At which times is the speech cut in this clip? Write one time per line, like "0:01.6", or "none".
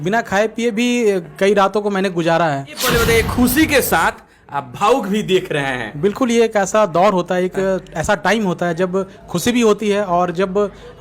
0:02.8